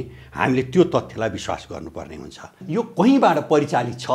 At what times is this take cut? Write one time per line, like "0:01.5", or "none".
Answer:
0:02.6

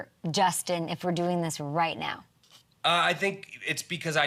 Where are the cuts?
none

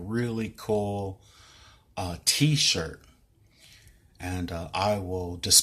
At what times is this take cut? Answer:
0:04.4

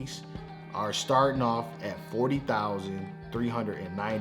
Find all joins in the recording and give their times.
none

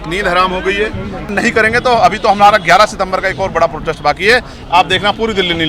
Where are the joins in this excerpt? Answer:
0:01.3

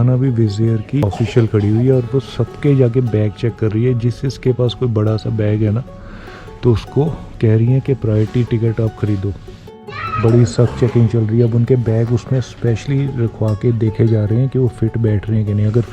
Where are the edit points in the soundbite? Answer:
0:01.1
0:09.5

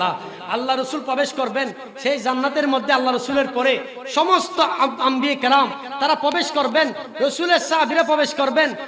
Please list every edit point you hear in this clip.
none

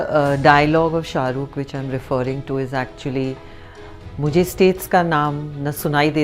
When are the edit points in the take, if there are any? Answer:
none

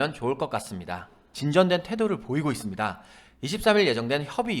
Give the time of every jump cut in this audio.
0:01.2

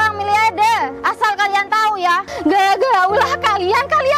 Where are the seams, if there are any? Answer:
0:01.0
0:02.3

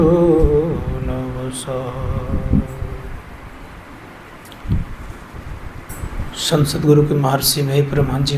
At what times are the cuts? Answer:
0:05.9

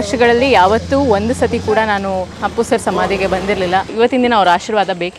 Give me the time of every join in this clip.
0:02.4
0:03.9

